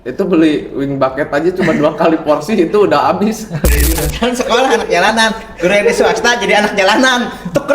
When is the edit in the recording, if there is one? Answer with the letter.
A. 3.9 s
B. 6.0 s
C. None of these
A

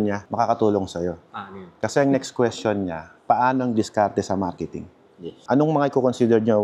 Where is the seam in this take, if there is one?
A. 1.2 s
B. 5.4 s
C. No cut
B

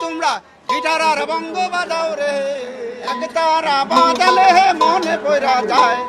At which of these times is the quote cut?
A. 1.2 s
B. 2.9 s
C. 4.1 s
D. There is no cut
B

